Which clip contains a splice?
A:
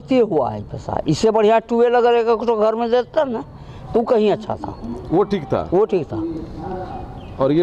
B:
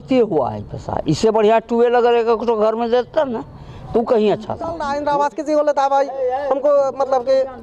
B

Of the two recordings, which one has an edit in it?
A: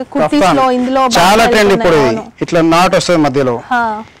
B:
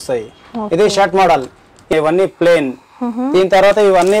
B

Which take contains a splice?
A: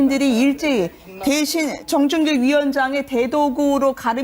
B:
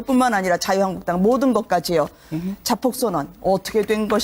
A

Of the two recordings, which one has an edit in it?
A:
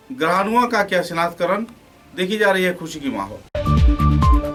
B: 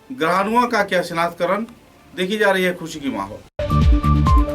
B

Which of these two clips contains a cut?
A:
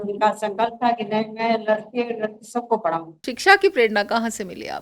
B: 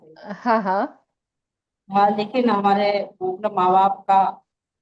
A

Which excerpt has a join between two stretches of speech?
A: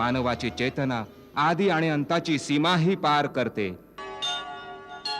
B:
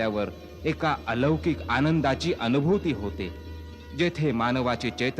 A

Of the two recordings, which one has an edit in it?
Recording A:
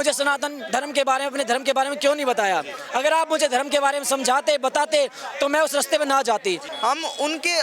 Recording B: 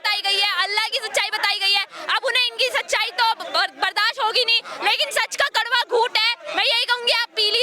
A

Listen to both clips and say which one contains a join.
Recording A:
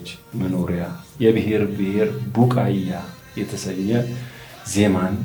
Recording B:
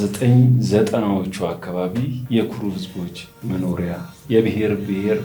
B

